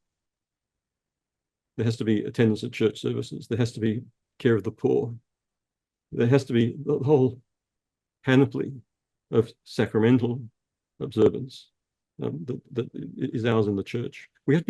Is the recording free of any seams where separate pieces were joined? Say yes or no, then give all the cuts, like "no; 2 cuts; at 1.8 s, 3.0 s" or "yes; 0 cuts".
yes; 0 cuts